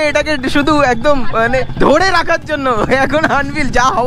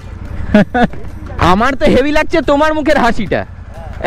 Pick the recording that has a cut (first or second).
second